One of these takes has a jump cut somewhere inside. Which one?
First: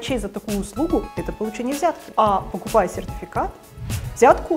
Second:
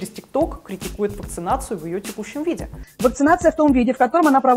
first; 1 cut; at 1.6 s

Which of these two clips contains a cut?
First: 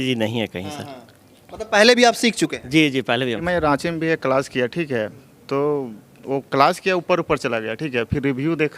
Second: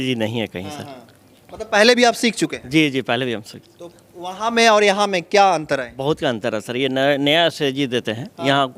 first; 1 cut; at 3.4 s

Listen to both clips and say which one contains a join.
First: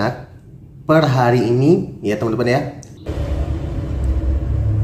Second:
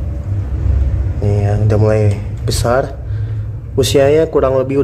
first; 1 cut; at 3.1 s

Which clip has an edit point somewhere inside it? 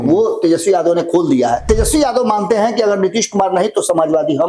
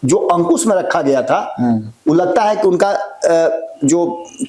first; 1 cut; at 1.6 s

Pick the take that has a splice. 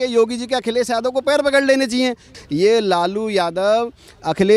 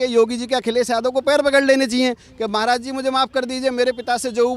first; 1 cut; at 2.3 s

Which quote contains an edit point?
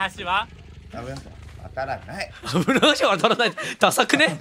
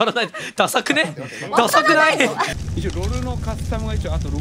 second; 1 cut; at 2.5 s

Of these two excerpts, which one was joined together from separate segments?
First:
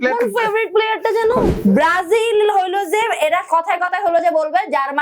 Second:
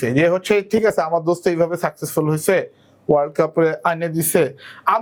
first; 1 cut; at 1.5 s

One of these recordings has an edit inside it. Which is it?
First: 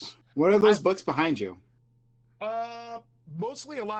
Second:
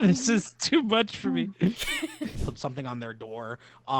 second; 1 cut; at 2.4 s

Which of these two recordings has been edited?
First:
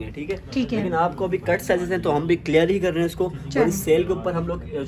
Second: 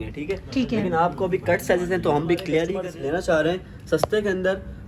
second; 1 cut; at 2.8 s

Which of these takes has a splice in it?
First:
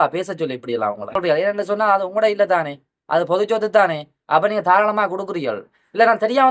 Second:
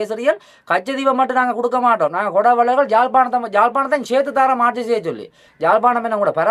first; 1 cut; at 1.2 s

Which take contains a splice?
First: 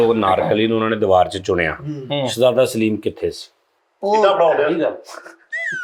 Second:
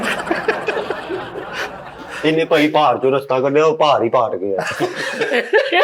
second; 1 cut; at 2.1 s

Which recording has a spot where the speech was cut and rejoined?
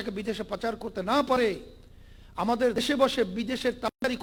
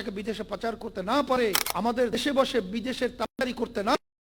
second; 1 cut; at 1.7 s

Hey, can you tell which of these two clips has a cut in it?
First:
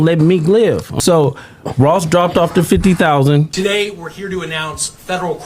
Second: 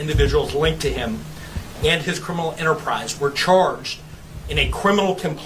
first; 2 cuts; at 0.9 s, 3.5 s

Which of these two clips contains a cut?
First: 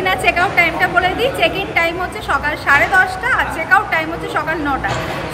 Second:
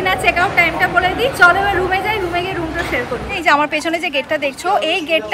second; 2 cuts; at 1.3 s, 3.4 s

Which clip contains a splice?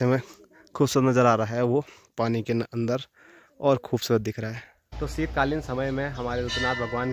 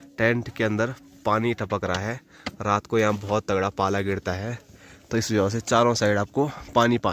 first; 1 cut; at 5.0 s

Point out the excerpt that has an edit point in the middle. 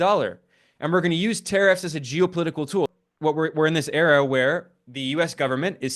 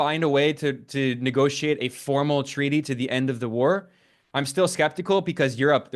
first; 1 cut; at 2.9 s

